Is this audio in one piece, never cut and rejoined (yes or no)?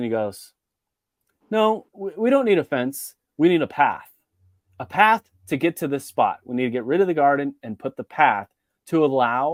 yes